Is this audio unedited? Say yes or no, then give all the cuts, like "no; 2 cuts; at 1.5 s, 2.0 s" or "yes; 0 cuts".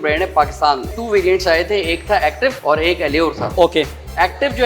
no; 3 cuts; at 0.9 s, 2.6 s, 3.5 s